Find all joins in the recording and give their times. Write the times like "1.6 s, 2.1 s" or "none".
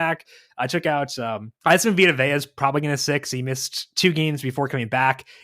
1.5 s

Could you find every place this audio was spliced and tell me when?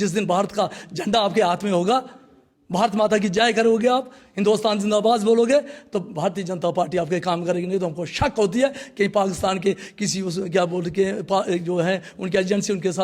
none

